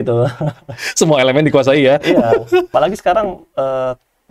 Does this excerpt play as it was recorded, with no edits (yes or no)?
no